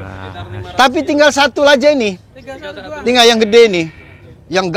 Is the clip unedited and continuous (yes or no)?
yes